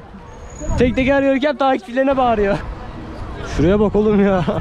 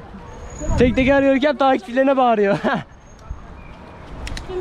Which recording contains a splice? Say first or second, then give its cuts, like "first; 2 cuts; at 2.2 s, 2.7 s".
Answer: first; 1 cut; at 2.6 s